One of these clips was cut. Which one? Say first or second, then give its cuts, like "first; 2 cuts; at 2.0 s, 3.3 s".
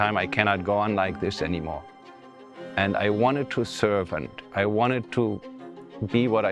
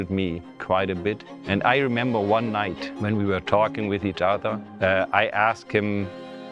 second; 3 cuts; at 1.3 s, 2.8 s, 4.6 s